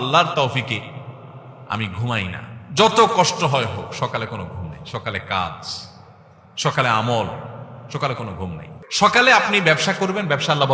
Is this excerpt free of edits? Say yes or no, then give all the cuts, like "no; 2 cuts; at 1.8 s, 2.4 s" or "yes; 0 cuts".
no; 1 cut; at 8.8 s